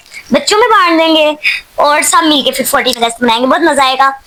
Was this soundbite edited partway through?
no; 0 cuts

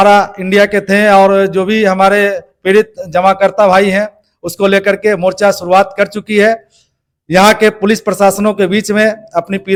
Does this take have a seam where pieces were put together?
no; 0 cuts

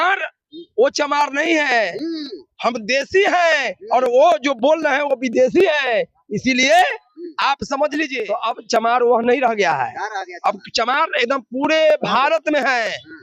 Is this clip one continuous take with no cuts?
no; 1 cut; at 8.3 s

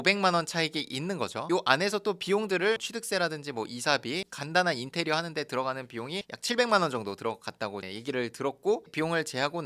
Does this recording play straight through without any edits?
yes; 0 cuts

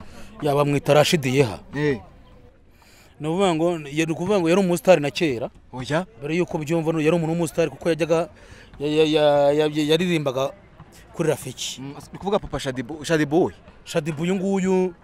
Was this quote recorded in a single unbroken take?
yes; 0 cuts

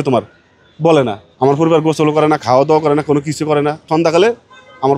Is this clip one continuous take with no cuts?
no; 2 cuts; at 1.2 s, 3.8 s

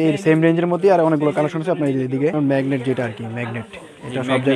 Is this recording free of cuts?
no; 1 cut; at 2.3 s

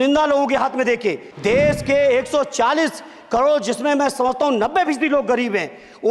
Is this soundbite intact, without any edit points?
no; 1 cut; at 1.3 s

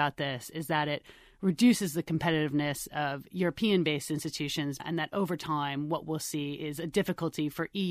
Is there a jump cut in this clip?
yes; 1 cut; at 4.8 s

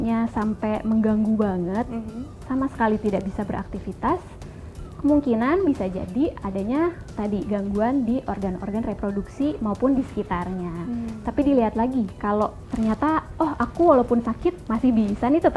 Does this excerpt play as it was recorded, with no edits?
yes; 0 cuts

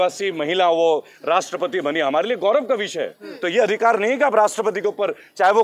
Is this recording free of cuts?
yes; 0 cuts

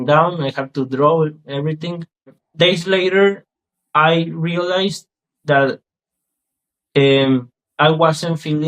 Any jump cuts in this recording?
yes; 1 cut; at 2.4 s

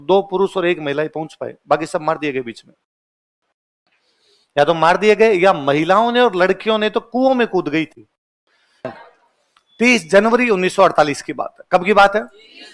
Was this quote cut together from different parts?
yes; 1 cut; at 8.9 s

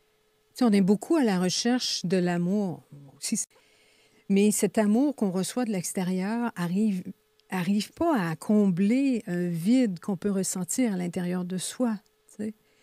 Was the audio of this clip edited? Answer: yes; 1 cut; at 3.5 s

